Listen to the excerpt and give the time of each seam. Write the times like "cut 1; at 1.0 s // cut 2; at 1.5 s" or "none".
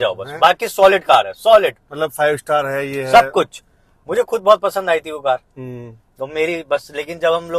none